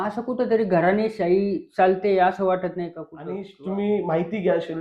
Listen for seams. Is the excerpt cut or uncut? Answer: cut